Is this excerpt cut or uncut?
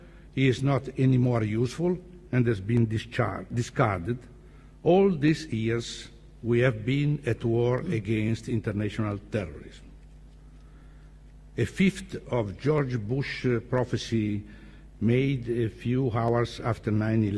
uncut